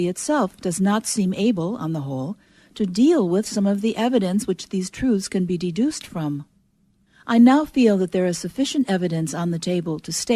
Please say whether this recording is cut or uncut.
uncut